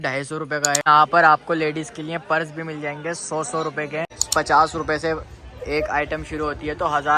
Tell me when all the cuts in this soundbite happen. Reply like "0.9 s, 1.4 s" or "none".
0.9 s, 4.2 s

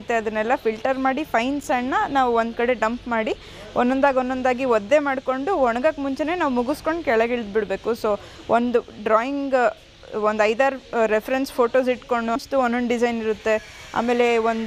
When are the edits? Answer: 12.4 s

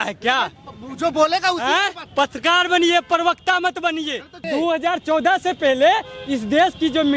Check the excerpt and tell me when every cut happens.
2.0 s, 4.3 s

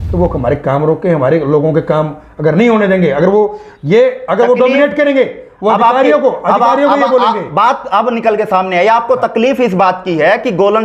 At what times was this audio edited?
none

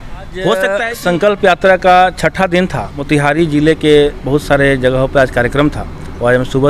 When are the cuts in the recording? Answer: 0.9 s, 3.0 s

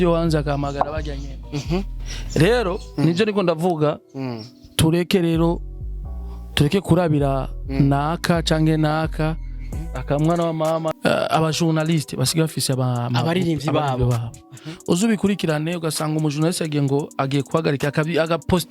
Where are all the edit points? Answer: 10.9 s

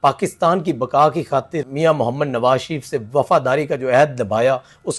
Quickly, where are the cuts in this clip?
1.7 s

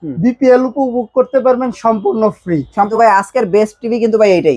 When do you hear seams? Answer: 2.9 s

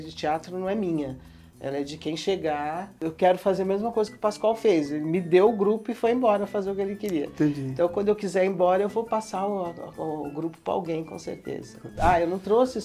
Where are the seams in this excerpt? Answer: 2.9 s, 11.9 s

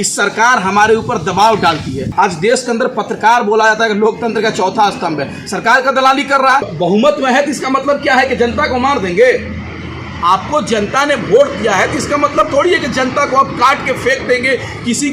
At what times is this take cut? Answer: 2.0 s, 6.7 s

